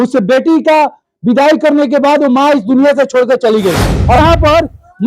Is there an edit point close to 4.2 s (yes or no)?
yes